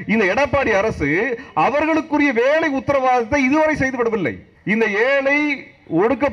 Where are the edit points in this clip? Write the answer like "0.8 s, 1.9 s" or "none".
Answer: 4.5 s